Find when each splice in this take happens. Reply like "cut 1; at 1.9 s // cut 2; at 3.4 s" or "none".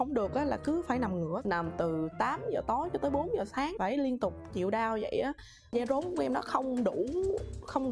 cut 1; at 1.4 s // cut 2; at 5.7 s

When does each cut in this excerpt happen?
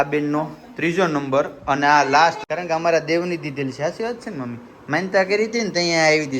cut 1; at 2.4 s

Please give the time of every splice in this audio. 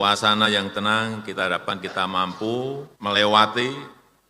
cut 1; at 2.9 s

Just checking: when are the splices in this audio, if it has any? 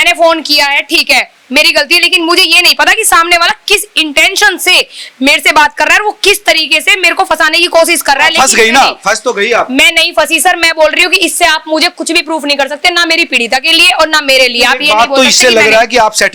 none

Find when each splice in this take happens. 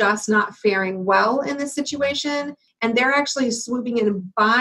cut 1; at 2.6 s

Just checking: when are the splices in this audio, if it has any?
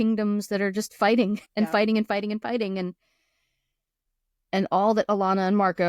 cut 1; at 1.4 s

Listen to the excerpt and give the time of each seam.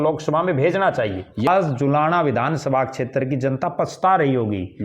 cut 1; at 1.5 s

